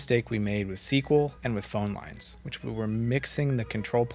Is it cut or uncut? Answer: uncut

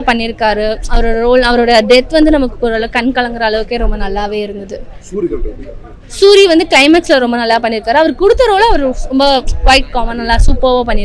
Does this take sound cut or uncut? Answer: uncut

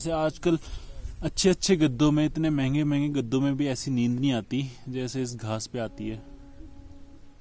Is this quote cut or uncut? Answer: uncut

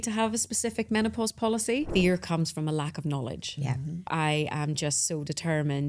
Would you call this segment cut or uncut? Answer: cut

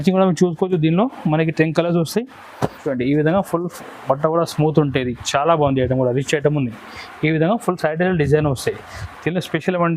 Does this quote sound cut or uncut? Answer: cut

